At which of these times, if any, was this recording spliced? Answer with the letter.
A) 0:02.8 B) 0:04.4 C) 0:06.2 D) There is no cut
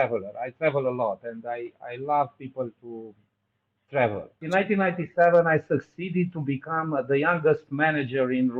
B